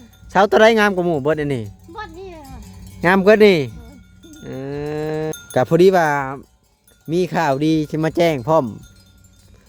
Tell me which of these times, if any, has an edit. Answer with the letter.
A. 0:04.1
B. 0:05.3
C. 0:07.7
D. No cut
B